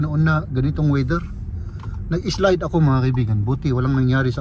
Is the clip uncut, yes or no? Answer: yes